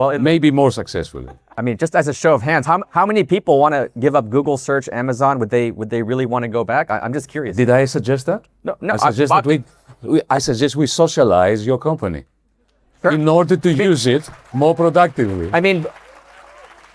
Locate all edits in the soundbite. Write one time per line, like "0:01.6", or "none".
0:01.5